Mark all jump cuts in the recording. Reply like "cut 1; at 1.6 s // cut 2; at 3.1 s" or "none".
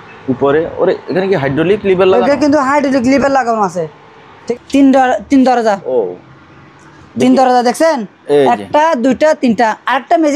cut 1; at 4.5 s